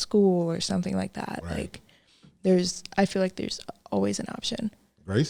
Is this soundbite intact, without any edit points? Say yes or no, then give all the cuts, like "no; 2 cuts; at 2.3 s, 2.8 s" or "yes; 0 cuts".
yes; 0 cuts